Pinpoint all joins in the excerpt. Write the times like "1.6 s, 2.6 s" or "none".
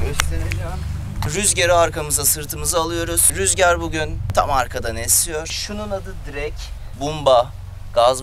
1.3 s, 4.2 s, 5.5 s, 6.8 s